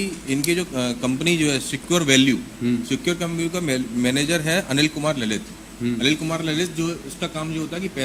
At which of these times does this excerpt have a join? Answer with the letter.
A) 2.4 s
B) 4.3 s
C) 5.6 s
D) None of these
D